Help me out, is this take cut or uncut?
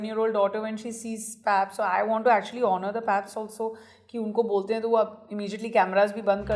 uncut